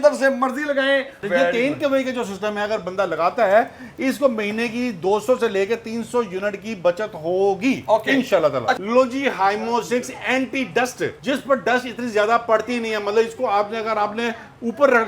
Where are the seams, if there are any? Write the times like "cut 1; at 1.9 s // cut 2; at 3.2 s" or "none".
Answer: cut 1; at 1.2 s // cut 2; at 8.8 s